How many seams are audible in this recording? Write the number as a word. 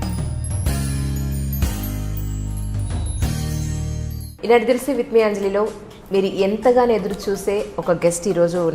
one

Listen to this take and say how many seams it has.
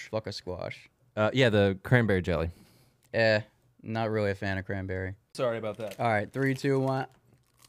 one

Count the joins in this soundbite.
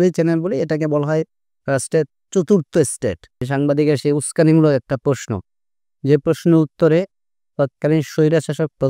one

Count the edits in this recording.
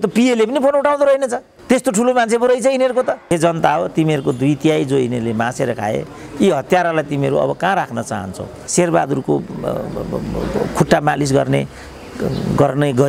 two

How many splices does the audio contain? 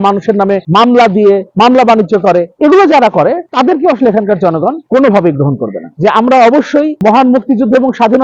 two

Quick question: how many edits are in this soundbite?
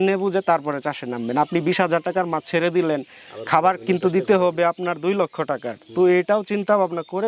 zero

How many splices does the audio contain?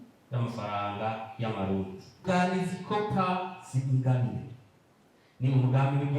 one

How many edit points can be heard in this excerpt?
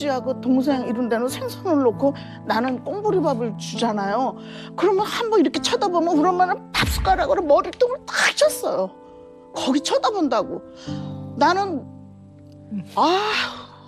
zero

